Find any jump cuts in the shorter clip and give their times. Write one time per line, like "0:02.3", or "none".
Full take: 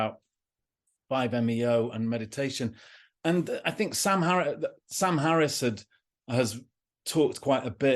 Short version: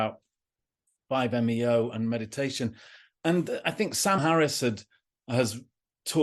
0:04.2